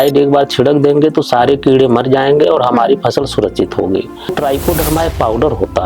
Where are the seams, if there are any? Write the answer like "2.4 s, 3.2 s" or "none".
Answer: 4.3 s